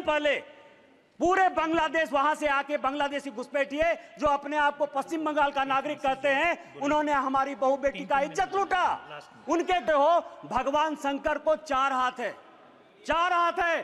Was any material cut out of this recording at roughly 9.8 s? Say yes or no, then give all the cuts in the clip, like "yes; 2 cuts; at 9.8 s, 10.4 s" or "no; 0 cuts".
yes; 1 cut; at 9.8 s